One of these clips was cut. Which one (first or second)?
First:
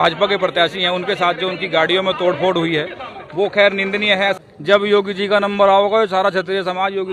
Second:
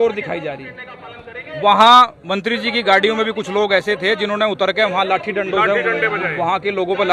first